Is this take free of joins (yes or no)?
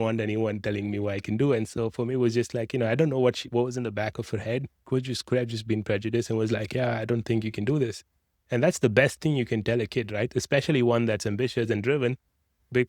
yes